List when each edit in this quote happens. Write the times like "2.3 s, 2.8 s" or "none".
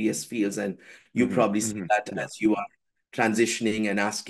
none